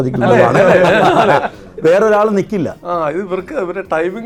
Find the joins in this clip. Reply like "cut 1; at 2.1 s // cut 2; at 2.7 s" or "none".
none

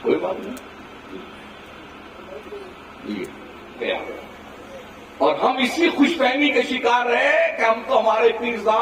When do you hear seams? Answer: cut 1; at 3.9 s

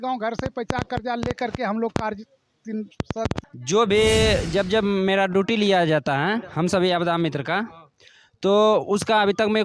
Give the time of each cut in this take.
cut 1; at 3.4 s

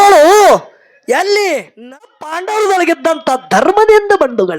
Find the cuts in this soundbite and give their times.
cut 1; at 2.0 s

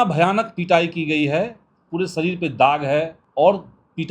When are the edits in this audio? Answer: cut 1; at 3.2 s

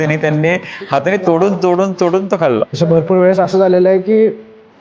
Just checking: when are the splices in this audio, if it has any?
cut 1; at 2.7 s

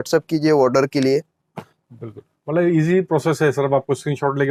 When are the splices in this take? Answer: none

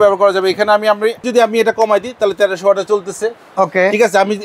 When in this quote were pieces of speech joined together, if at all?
cut 1; at 1.3 s

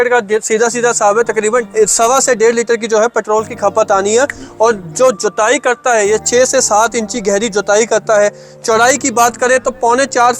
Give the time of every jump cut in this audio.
cut 1; at 1.7 s

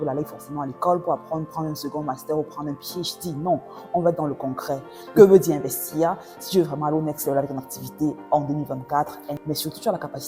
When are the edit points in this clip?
cut 1; at 5.0 s // cut 2; at 9.3 s

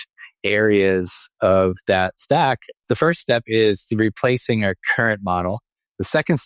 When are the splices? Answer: cut 1; at 2.7 s

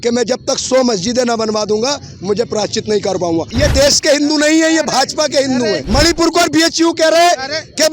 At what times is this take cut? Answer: cut 1; at 3.5 s // cut 2; at 5.8 s

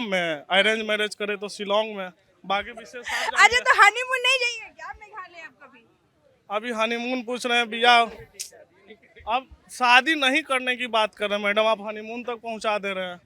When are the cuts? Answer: none

